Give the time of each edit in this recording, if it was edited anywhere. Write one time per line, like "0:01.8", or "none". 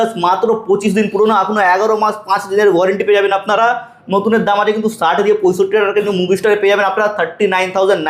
none